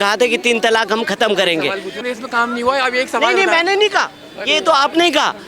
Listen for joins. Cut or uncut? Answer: cut